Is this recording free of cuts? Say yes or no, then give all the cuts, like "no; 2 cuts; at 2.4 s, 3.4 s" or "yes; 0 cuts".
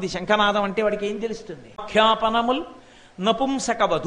no; 1 cut; at 1.8 s